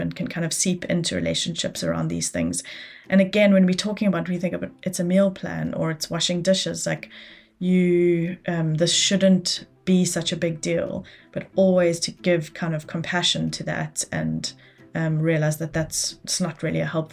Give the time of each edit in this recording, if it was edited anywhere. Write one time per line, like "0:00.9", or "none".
none